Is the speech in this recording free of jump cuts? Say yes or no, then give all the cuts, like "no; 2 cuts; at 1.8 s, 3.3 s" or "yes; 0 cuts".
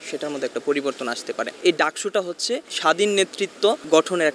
yes; 0 cuts